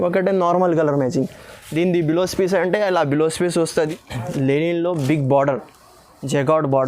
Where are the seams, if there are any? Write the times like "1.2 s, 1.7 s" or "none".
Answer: 3.7 s